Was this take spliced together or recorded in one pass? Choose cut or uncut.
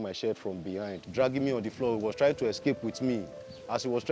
cut